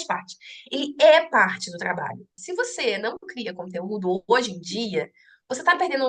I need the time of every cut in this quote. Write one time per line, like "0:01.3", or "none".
0:02.4